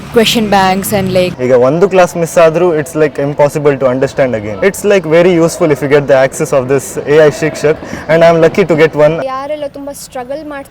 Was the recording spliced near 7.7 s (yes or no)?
no